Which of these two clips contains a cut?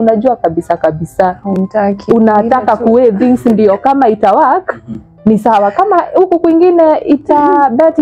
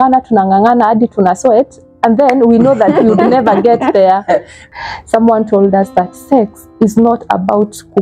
second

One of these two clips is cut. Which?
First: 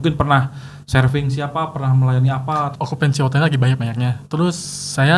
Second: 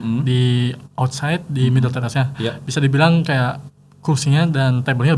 first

